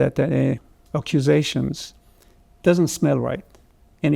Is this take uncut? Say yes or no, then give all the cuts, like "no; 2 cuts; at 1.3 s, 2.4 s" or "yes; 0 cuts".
yes; 0 cuts